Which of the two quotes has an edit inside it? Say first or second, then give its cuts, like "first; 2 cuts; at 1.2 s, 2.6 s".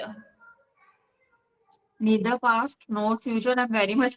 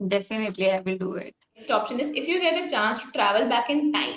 second; 1 cut; at 1.6 s